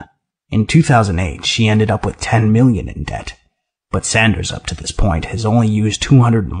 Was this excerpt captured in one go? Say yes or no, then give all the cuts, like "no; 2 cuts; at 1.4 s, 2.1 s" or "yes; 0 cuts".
no; 1 cut; at 2.9 s